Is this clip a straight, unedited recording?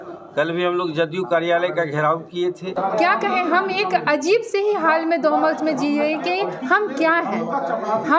no; 1 cut; at 2.8 s

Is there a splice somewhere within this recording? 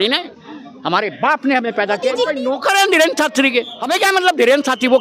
yes; 2 cuts; at 2.1 s, 3.8 s

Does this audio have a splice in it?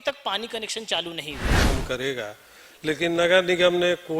yes; 1 cut; at 1.7 s

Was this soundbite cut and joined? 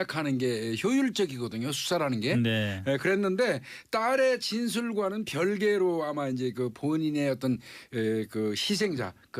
yes; 1 cut; at 4.7 s

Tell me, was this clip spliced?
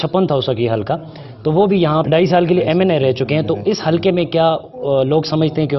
yes; 1 cut; at 2.0 s

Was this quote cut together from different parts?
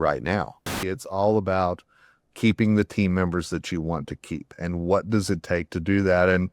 yes; 1 cut; at 1.0 s

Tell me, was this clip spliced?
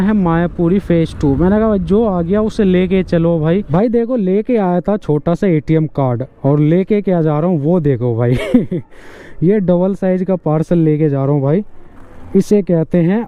yes; 1 cut; at 3.7 s

